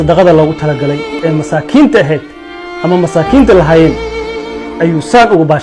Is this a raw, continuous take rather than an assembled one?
no; 1 cut; at 1.1 s

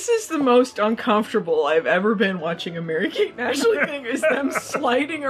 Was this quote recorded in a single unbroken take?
yes; 0 cuts

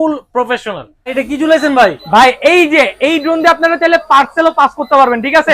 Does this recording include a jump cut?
yes; 1 cut; at 1.1 s

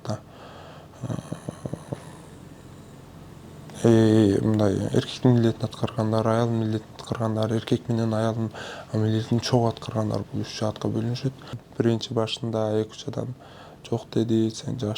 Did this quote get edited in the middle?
yes; 1 cut; at 11.6 s

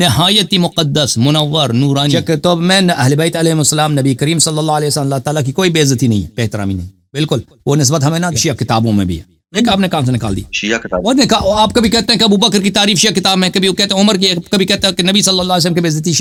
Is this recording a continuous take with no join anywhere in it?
yes; 0 cuts

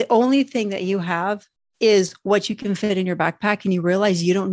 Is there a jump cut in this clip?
no; 0 cuts

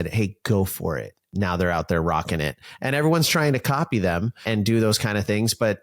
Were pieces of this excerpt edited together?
yes; 2 cuts; at 1.2 s, 4.4 s

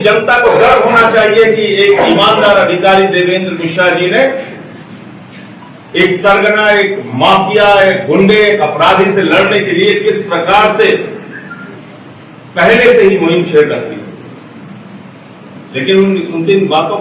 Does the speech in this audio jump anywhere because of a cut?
no; 0 cuts

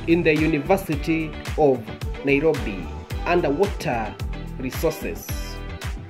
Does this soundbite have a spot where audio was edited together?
yes; 1 cut; at 5.2 s

